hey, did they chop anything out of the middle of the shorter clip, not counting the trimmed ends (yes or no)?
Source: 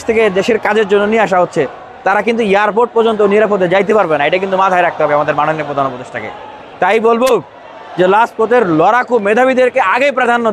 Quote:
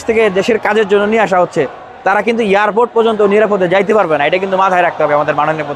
no